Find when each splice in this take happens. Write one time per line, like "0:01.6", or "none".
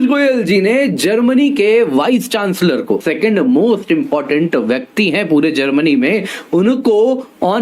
0:03.1